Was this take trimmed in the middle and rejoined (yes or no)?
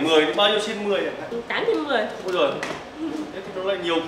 no